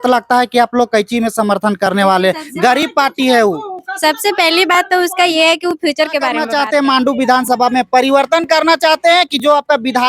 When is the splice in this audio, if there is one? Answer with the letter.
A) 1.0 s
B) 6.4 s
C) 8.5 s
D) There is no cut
B